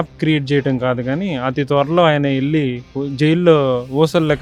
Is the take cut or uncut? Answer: uncut